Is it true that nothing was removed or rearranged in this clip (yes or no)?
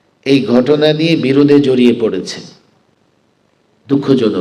yes